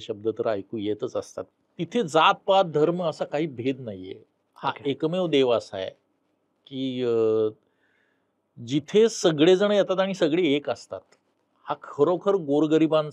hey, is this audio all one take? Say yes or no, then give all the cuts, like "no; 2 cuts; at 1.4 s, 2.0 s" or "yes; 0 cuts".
no; 1 cut; at 1.4 s